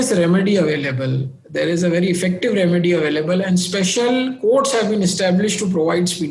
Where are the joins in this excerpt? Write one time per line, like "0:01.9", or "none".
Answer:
none